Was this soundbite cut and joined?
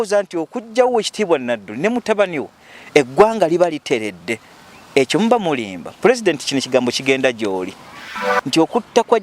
yes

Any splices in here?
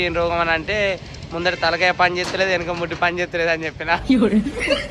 yes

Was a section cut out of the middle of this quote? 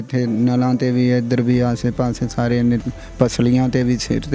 no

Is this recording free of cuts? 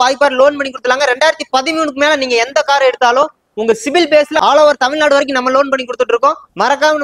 yes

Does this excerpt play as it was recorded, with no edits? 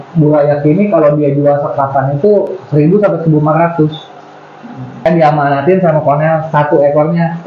no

